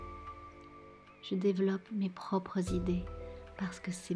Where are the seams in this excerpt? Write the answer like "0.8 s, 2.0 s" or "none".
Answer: 1.2 s